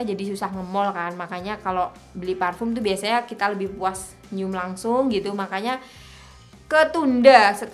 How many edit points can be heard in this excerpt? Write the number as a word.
zero